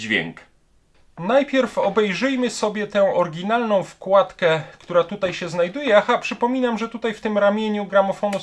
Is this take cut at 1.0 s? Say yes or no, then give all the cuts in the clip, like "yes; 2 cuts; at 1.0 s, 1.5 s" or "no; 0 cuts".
no; 0 cuts